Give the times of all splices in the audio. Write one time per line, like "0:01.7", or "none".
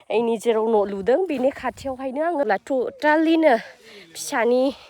0:02.5